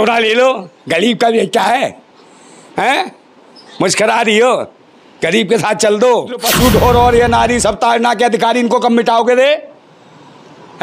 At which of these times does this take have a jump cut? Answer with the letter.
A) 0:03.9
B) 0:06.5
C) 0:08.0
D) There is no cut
B